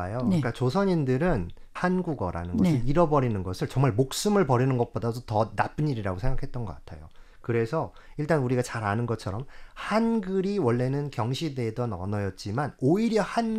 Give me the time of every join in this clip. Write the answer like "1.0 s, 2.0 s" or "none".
1.7 s